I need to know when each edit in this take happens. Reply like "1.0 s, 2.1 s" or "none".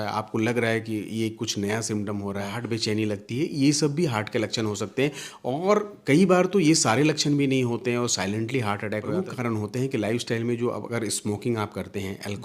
2.5 s, 9.2 s